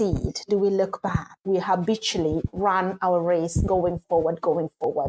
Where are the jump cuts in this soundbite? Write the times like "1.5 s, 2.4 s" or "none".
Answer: 1.3 s